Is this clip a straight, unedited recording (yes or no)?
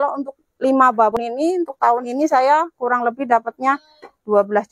no